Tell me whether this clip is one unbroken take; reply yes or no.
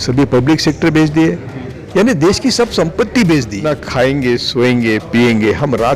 no